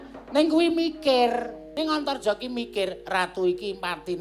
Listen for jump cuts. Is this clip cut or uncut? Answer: cut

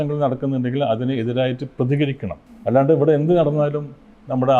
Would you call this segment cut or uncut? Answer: uncut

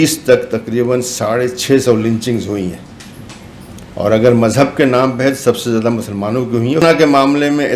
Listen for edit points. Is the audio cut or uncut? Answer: cut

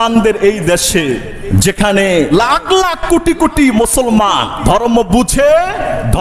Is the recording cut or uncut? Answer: cut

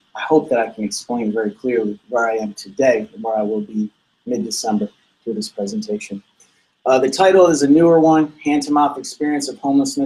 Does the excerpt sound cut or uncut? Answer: uncut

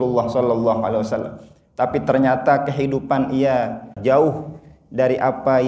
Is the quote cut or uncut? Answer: cut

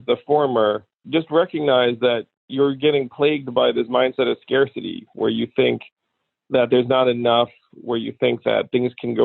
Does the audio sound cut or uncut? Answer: cut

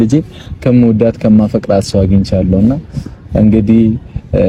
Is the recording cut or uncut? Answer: uncut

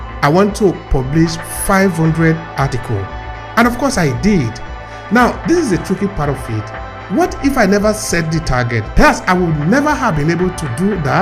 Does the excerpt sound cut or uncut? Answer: uncut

